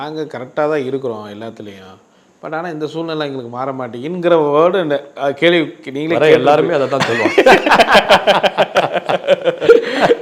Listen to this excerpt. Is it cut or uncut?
uncut